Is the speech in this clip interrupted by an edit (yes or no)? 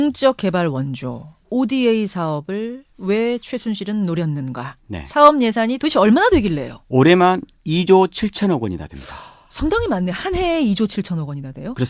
yes